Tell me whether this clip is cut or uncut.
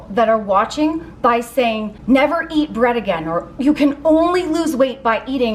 cut